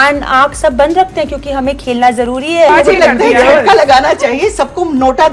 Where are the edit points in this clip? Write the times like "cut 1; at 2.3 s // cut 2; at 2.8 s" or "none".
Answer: cut 1; at 2.7 s

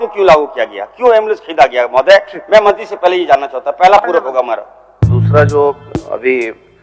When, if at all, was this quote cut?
cut 1; at 5.1 s

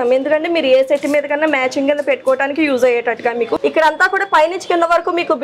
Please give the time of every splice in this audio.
cut 1; at 3.5 s

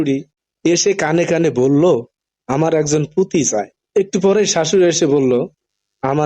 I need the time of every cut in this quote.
cut 1; at 3.8 s

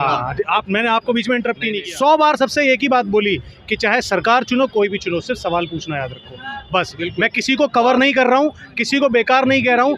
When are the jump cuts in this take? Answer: cut 1; at 1.8 s

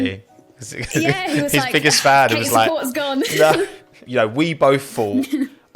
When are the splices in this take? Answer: cut 1; at 4.0 s

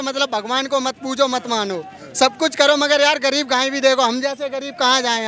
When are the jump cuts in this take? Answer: none

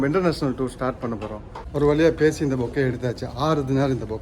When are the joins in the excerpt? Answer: cut 1; at 1.5 s

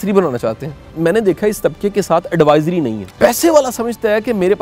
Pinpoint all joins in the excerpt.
cut 1; at 0.9 s // cut 2; at 3.0 s

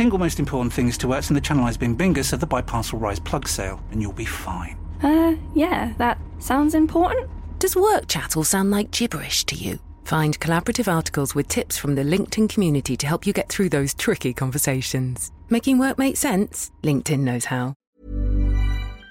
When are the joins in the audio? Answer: cut 1; at 17.8 s

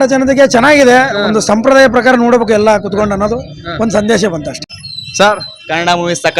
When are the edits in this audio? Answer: cut 1; at 4.6 s

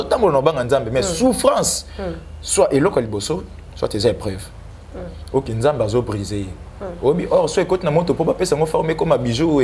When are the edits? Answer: none

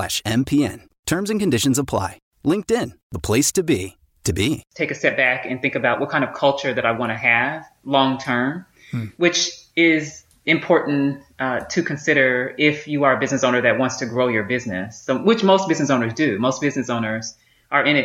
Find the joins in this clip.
cut 1; at 4.6 s

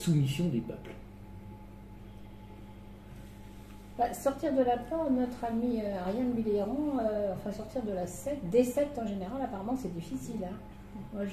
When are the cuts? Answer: none

